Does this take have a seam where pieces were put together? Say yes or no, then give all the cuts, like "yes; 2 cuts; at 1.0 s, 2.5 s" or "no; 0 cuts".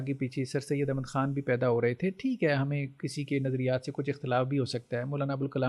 no; 0 cuts